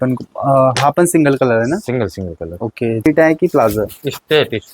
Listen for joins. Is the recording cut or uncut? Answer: cut